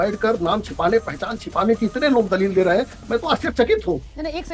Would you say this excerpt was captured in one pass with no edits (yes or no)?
yes